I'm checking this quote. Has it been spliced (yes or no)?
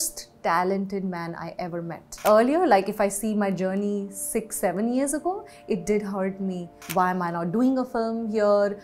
yes